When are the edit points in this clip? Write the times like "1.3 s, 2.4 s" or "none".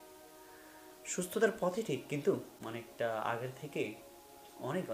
2.6 s